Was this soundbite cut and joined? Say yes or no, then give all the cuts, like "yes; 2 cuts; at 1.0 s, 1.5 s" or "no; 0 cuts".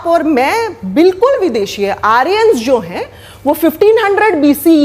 no; 0 cuts